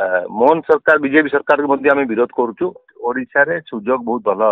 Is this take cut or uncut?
cut